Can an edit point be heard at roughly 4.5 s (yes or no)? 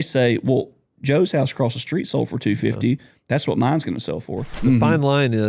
yes